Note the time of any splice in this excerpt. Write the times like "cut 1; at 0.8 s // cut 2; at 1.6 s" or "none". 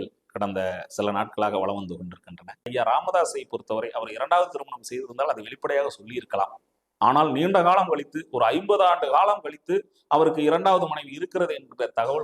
cut 1; at 2.6 s